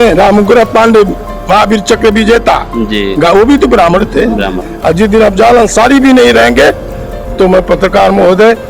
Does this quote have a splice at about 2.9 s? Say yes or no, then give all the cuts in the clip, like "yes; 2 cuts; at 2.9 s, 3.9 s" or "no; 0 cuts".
no; 1 cut; at 4.5 s